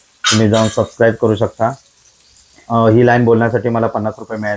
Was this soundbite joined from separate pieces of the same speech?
no; 0 cuts

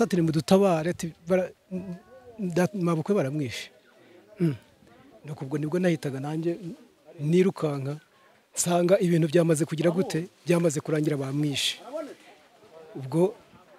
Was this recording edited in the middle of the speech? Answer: no; 0 cuts

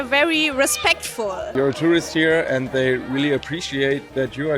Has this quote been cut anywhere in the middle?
yes; 1 cut; at 1.5 s

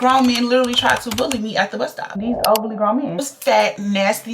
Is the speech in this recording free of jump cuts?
no; 2 cuts; at 2.1 s, 3.1 s

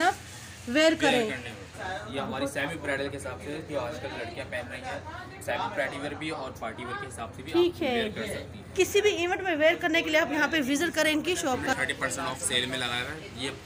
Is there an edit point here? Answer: yes; 3 cuts; at 1.6 s, 8.6 s, 11.7 s

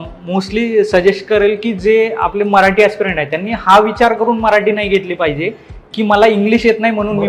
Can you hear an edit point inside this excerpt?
no; 0 cuts

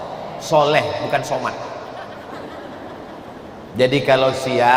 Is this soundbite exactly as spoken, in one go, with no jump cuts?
yes; 0 cuts

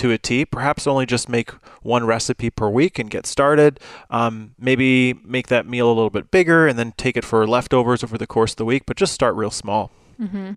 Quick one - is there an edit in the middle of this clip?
no; 0 cuts

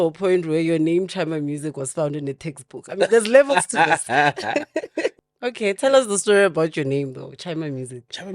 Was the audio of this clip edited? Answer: yes; 1 cut; at 5.2 s

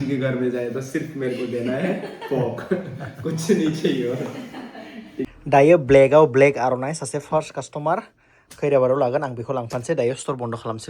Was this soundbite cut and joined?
yes; 1 cut; at 5.3 s

